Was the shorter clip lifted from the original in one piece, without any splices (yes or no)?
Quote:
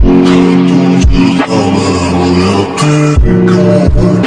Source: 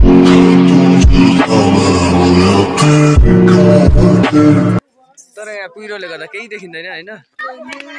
yes